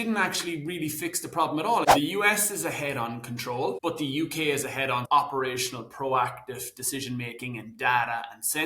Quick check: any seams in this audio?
yes; 2 cuts; at 1.9 s, 3.8 s

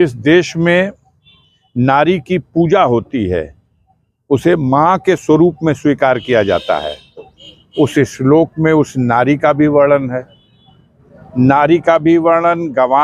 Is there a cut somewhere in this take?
no; 0 cuts

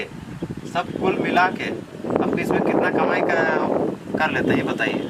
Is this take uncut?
yes; 0 cuts

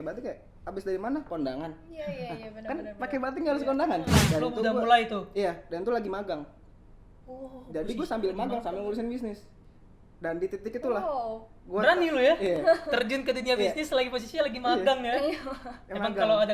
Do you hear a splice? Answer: yes; 1 cut; at 4.2 s

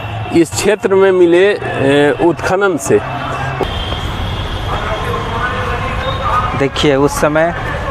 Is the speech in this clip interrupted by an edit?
yes; 1 cut; at 3.6 s

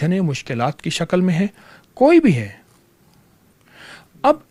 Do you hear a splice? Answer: no; 0 cuts

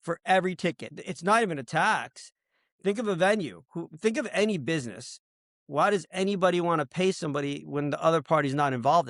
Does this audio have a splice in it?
yes; 1 cut; at 0.9 s

